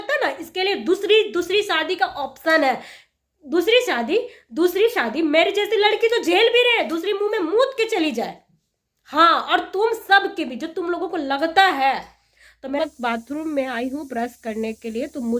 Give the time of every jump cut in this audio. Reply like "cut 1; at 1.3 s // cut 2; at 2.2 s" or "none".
cut 1; at 12.8 s